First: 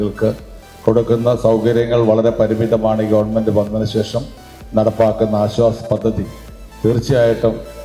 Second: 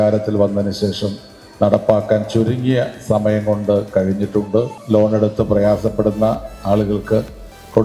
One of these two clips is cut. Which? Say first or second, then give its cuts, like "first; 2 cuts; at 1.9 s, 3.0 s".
second; 1 cut; at 4.8 s